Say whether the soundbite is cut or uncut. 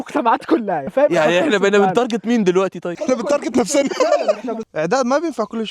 cut